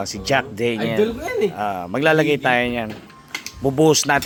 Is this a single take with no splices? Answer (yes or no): yes